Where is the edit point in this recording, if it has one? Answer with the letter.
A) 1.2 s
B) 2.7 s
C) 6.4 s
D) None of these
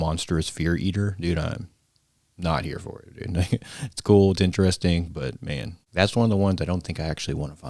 D